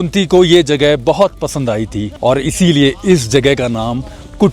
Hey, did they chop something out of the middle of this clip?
yes; 1 cut; at 2.1 s

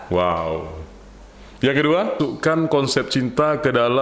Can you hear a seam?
yes; 1 cut; at 2.2 s

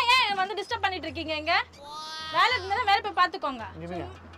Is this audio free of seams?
yes; 0 cuts

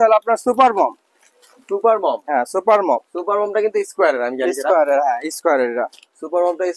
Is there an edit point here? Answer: no; 0 cuts

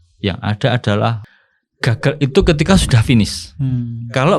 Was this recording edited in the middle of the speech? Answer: yes; 1 cut; at 1.2 s

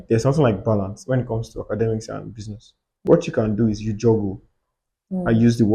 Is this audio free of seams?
no; 1 cut; at 2.9 s

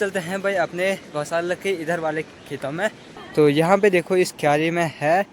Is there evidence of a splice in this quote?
yes; 1 cut; at 3.2 s

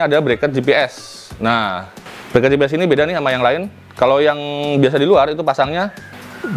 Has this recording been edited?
no; 0 cuts

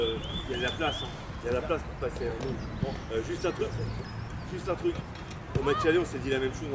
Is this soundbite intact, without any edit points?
yes; 0 cuts

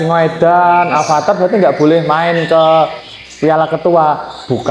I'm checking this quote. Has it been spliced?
no; 0 cuts

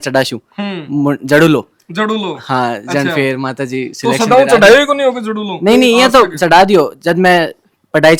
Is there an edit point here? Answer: no; 0 cuts

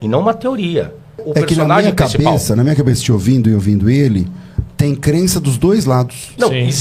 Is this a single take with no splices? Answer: no; 1 cut; at 1.2 s

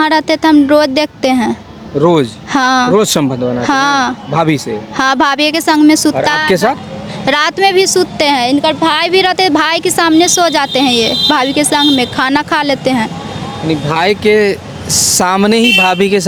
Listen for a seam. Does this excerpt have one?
no; 0 cuts

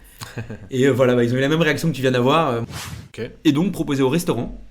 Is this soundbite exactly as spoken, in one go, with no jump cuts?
no; 1 cut; at 2.6 s

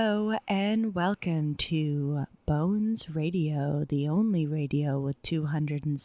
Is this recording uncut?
yes; 0 cuts

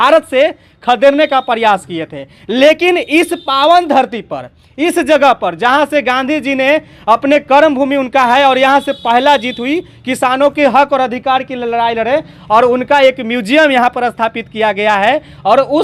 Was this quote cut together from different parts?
no; 0 cuts

